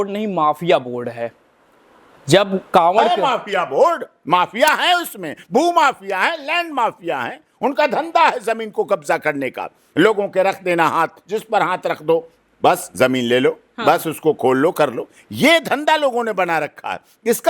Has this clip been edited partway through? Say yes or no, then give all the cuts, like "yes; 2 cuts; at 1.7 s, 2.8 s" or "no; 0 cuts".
no; 0 cuts